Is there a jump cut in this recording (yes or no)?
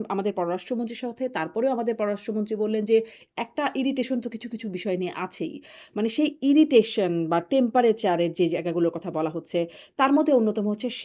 no